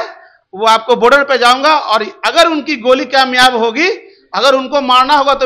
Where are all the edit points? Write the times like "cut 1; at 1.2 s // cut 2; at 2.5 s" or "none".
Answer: none